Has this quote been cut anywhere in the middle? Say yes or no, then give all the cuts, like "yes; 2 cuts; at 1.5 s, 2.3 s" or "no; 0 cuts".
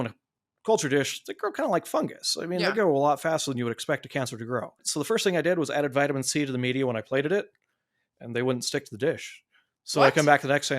yes; 1 cut; at 4.8 s